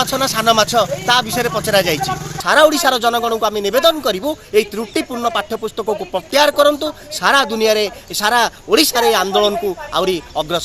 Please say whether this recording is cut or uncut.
cut